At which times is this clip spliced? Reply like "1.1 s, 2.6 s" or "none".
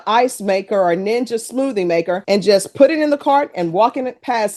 none